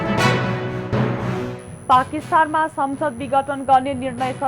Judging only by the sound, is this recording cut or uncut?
cut